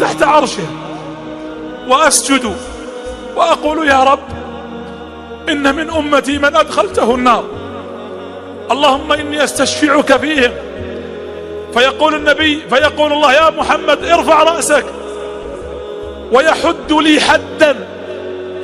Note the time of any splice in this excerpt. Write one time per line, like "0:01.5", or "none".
0:14.8
0:16.3